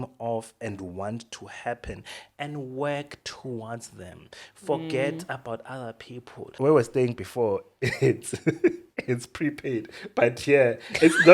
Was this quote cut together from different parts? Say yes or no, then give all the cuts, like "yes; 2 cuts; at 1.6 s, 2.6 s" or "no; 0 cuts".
yes; 1 cut; at 6.5 s